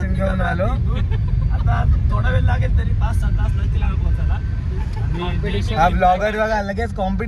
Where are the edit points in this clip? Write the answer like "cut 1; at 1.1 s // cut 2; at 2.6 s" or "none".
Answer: none